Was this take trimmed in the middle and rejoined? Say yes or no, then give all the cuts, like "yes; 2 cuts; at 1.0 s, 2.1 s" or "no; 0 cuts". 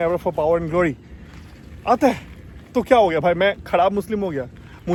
no; 0 cuts